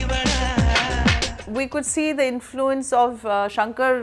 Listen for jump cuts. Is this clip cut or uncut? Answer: cut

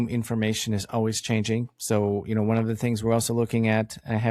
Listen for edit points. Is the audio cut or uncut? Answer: uncut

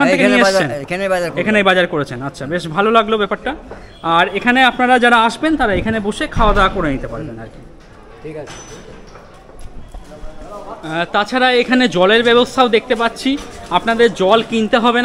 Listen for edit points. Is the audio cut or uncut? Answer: uncut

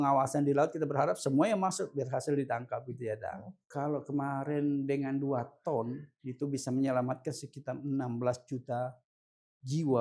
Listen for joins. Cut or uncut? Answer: cut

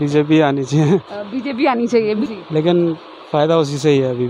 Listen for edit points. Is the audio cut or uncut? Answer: cut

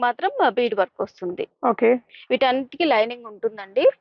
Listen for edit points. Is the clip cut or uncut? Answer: uncut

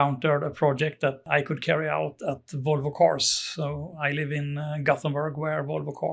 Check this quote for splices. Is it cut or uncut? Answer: cut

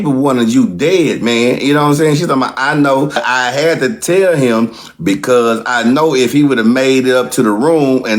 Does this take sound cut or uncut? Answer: cut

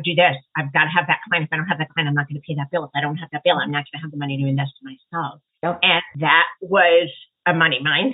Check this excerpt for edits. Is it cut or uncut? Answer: cut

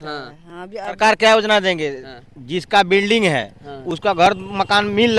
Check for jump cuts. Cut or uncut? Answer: cut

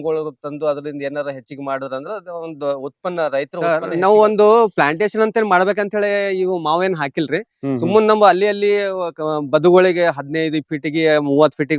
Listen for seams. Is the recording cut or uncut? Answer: cut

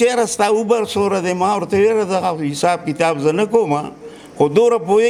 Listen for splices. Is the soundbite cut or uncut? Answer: uncut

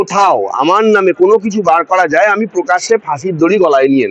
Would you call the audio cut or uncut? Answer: uncut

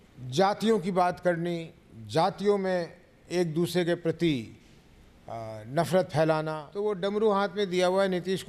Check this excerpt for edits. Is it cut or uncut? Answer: cut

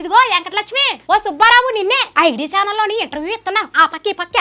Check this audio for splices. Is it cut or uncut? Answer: cut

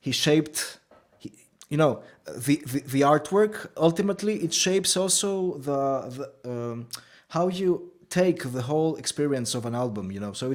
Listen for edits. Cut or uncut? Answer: uncut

